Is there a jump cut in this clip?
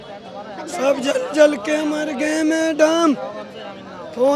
no; 0 cuts

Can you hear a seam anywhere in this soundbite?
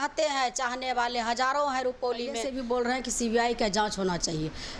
yes; 1 cut; at 2.5 s

